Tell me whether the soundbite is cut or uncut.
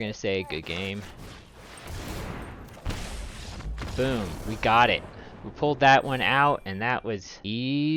uncut